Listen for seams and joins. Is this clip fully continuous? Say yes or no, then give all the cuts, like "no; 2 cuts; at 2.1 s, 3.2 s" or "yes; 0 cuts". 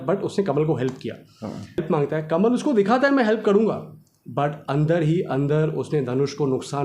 no; 1 cut; at 1.8 s